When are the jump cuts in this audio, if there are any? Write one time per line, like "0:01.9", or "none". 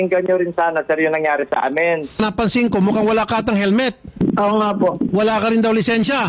0:02.2
0:04.1
0:05.1